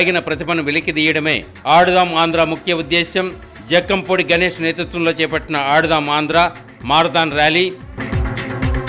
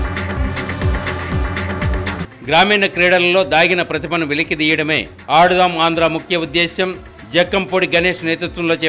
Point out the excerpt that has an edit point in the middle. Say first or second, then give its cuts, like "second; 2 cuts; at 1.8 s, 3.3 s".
second; 1 cut; at 2.2 s